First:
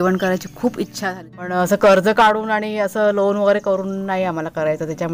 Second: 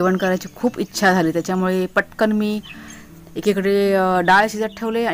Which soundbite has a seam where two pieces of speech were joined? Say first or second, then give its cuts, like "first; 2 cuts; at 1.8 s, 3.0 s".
first; 1 cut; at 1.0 s